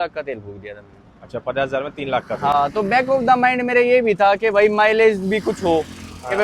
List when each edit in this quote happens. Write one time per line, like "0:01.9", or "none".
none